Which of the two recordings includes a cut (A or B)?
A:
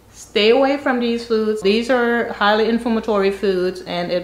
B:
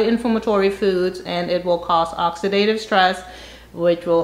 A